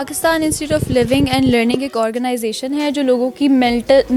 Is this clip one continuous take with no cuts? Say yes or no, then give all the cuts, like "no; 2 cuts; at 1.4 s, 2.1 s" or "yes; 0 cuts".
yes; 0 cuts